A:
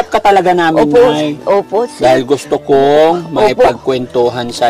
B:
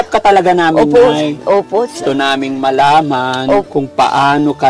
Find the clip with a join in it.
B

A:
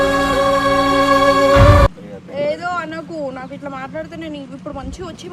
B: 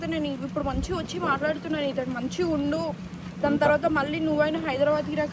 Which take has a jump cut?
A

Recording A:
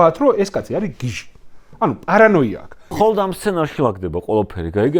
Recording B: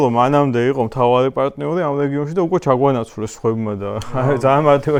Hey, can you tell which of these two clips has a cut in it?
A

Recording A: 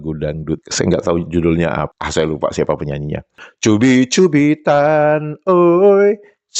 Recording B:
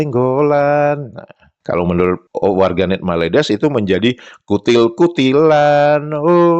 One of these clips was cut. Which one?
A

